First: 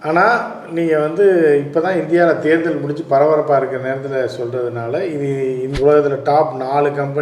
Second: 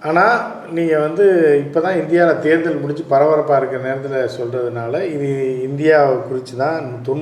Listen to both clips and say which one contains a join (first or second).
first